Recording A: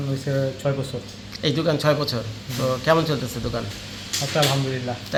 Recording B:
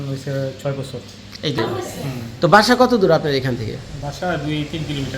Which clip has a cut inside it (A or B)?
B